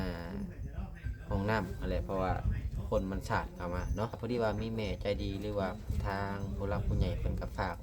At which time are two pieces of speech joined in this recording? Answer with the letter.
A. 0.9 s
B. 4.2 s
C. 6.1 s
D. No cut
B